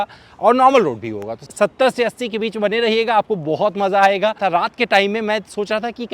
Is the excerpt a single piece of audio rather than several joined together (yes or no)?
no